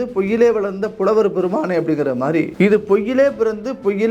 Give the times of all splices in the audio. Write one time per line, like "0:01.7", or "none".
0:02.5